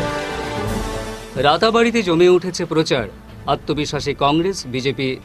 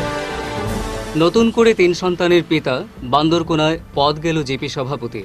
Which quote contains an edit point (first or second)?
second